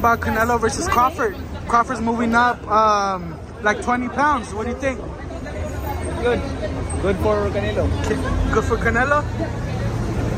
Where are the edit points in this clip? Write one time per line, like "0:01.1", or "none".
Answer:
none